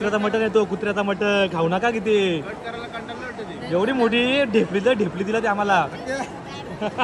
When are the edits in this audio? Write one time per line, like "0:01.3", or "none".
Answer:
none